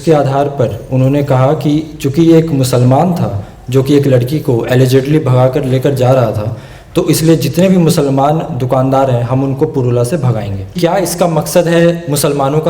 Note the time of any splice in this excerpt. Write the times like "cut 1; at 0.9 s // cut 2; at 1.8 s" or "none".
cut 1; at 10.8 s